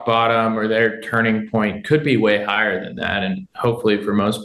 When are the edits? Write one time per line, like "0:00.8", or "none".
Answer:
none